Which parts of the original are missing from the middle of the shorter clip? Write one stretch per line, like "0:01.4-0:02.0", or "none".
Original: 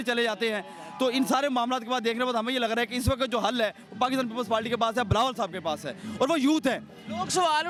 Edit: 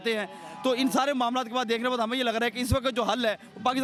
none